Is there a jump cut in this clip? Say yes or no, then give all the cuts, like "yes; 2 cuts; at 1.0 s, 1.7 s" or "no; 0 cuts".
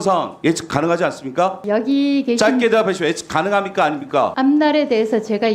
yes; 2 cuts; at 1.6 s, 4.3 s